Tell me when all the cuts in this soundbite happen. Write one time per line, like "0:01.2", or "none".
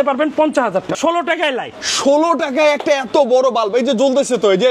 0:00.9